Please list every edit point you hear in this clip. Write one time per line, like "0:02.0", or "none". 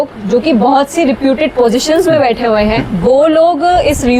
none